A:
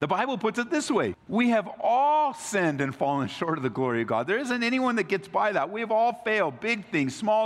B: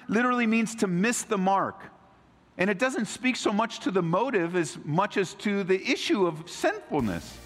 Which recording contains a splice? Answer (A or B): A